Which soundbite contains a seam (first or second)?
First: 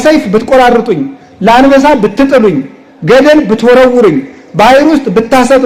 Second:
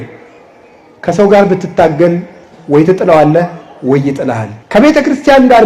second